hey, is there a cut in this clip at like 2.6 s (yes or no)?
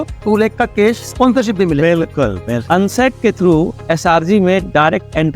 yes